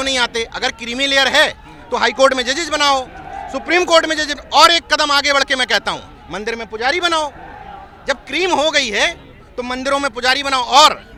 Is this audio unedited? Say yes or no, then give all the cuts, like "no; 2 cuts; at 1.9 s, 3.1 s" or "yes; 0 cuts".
yes; 0 cuts